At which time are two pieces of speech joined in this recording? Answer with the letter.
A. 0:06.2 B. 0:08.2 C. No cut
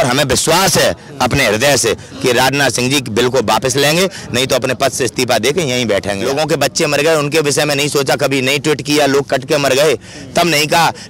A